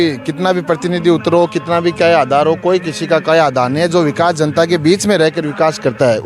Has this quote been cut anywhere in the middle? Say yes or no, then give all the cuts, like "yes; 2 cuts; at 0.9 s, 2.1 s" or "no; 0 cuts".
no; 0 cuts